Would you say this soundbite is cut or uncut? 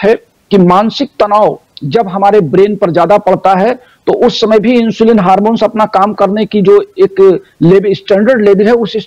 uncut